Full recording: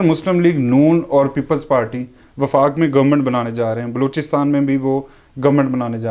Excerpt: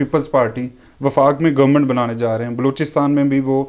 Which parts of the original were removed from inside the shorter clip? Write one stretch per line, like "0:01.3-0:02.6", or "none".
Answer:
none